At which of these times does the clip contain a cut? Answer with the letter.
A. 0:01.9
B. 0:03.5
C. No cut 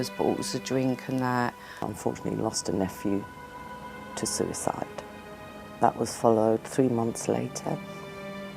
A